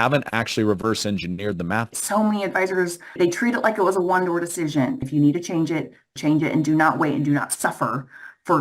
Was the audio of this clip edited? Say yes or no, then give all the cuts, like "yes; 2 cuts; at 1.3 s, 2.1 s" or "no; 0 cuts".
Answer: yes; 4 cuts; at 2.0 s, 3.2 s, 5.1 s, 6.1 s